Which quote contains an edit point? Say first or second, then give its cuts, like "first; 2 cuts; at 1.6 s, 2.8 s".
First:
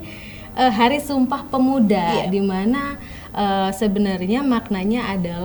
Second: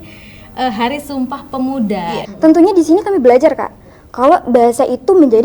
second; 1 cut; at 2.2 s